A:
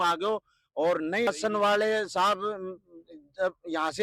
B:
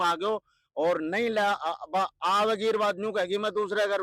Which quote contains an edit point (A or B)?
A